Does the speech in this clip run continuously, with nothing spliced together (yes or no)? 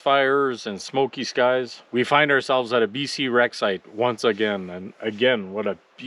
no